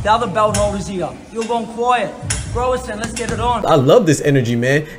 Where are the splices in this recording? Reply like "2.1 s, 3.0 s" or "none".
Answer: 3.6 s